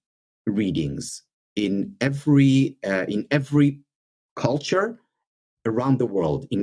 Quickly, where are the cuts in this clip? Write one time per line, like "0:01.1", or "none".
none